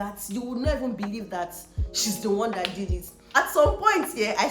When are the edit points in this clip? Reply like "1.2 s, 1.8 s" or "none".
3.2 s